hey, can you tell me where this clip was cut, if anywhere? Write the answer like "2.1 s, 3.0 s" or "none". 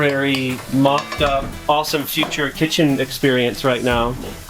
1.5 s